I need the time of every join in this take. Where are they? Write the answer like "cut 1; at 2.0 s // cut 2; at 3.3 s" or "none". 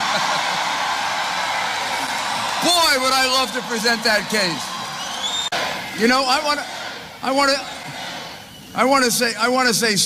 cut 1; at 6.7 s